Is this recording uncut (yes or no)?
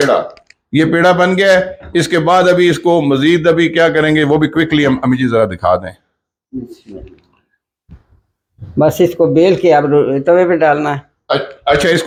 yes